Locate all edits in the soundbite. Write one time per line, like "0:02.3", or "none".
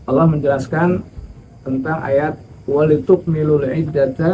0:02.5